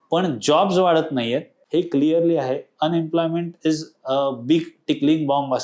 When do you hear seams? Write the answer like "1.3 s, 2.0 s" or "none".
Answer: 1.6 s